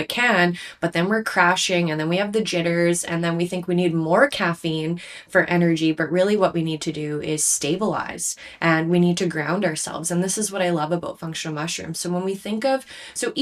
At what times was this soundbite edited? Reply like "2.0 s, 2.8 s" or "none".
none